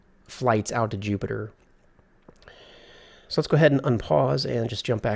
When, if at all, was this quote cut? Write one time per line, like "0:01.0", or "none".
0:04.0

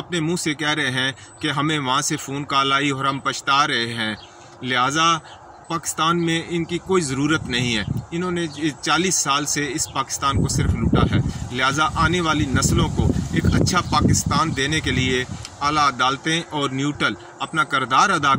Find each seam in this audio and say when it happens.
none

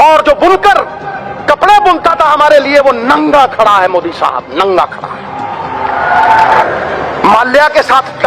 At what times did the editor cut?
none

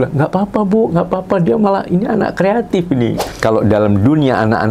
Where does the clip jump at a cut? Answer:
0:03.2

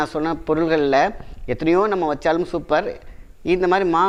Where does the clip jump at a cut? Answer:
none

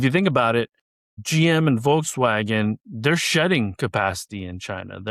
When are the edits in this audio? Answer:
none

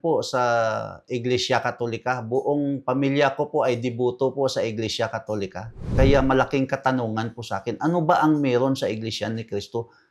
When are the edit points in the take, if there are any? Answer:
0:05.9

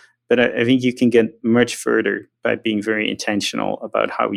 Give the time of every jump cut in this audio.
none

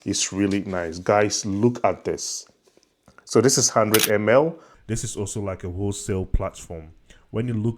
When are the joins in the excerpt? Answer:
0:04.7

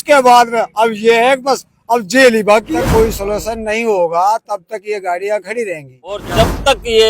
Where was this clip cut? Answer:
0:02.7
0:06.3

